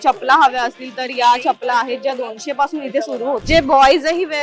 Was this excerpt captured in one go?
no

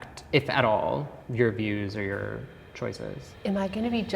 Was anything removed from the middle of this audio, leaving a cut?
yes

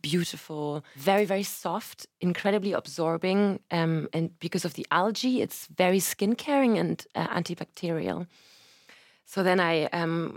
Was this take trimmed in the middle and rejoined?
yes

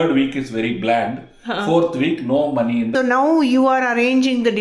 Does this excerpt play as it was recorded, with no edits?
no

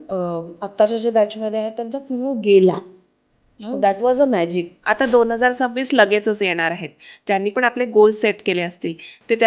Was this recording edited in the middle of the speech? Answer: yes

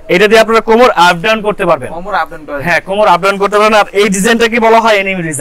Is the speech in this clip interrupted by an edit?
no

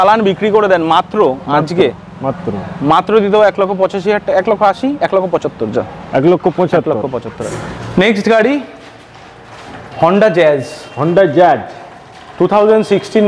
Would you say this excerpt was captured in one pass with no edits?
yes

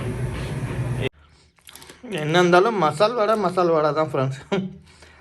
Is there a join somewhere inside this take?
yes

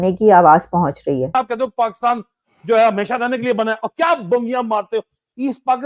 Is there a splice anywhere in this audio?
yes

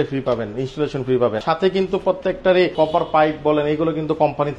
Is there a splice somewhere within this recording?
yes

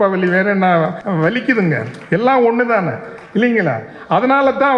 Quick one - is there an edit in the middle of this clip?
yes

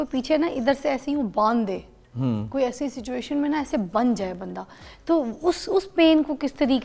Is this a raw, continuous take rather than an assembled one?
yes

